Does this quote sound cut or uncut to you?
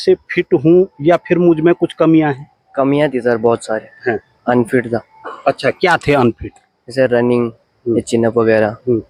uncut